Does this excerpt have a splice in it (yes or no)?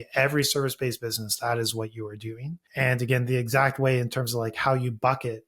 yes